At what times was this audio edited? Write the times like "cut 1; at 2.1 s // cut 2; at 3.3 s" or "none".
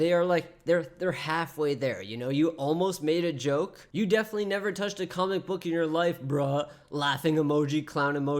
cut 1; at 3.8 s